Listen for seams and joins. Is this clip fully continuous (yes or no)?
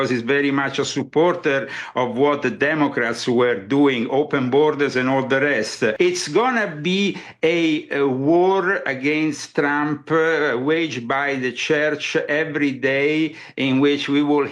no